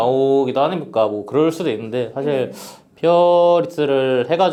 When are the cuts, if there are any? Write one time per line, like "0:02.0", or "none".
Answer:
none